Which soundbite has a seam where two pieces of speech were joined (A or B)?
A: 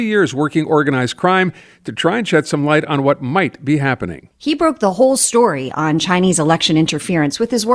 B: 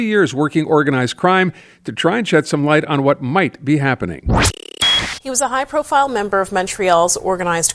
A